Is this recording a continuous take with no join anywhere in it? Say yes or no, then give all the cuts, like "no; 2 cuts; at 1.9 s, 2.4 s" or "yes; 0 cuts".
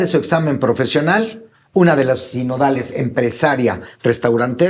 yes; 0 cuts